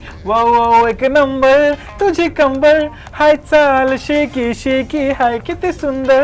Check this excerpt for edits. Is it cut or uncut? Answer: uncut